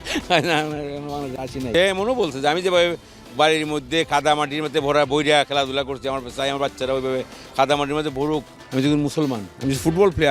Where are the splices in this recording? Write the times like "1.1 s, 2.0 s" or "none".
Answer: 1.7 s, 8.6 s

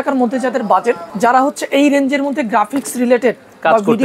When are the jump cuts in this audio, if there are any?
1.1 s

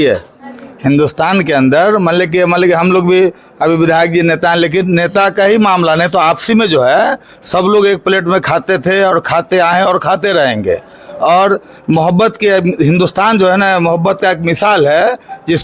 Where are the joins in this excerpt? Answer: none

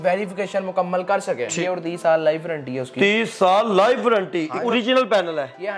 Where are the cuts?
1.5 s, 4.6 s

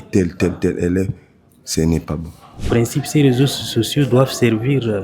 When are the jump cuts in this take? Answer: 2.5 s

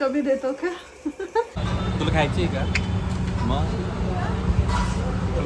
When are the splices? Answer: 1.6 s

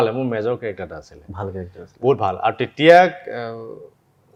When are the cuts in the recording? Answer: none

